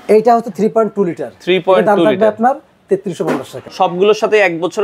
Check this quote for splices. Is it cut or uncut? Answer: cut